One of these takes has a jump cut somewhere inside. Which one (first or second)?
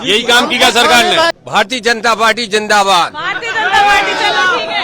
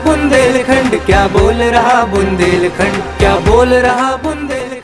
first